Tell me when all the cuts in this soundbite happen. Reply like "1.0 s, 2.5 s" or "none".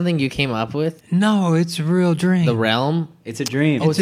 1.0 s